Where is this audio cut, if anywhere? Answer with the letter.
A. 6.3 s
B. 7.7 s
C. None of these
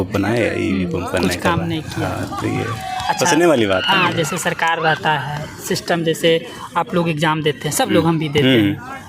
C